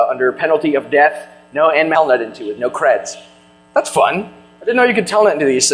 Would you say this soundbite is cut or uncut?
uncut